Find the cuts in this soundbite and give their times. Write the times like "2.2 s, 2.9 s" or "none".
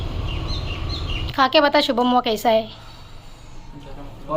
1.3 s

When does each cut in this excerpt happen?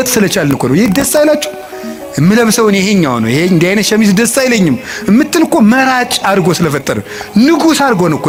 none

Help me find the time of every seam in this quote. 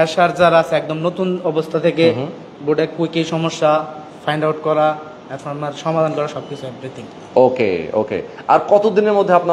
none

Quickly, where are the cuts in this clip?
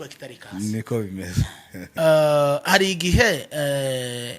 1.8 s

